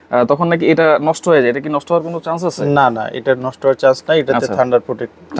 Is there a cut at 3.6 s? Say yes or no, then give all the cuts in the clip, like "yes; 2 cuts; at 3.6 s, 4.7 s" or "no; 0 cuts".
no; 0 cuts